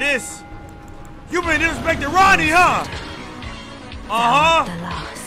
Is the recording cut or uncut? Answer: uncut